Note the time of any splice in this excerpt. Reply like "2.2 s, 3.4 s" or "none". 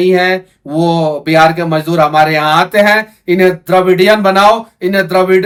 none